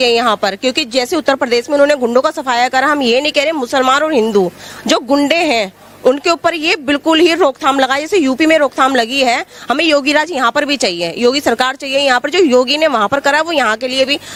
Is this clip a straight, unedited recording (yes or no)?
yes